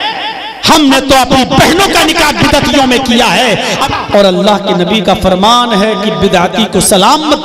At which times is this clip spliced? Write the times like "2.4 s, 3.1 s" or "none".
3.8 s